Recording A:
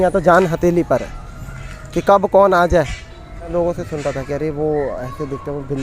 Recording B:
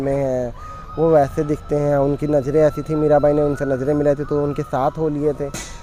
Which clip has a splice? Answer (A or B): A